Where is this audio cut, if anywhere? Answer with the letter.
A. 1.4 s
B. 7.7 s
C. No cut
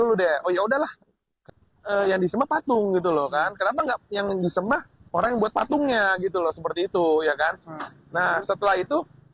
A